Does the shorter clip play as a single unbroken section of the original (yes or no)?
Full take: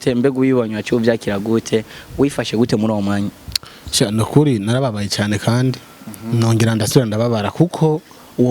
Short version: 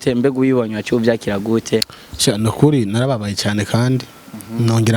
no